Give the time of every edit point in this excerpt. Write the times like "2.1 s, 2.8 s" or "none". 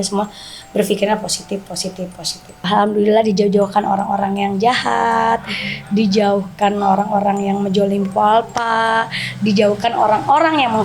2.7 s